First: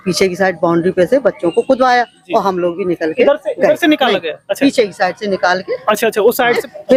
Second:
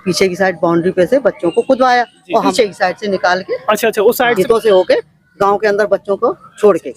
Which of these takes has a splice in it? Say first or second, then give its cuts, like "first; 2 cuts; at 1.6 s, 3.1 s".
second; 2 cuts; at 2.5 s, 4.3 s